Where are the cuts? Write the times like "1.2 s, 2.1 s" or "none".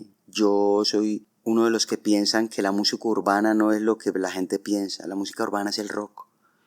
1.3 s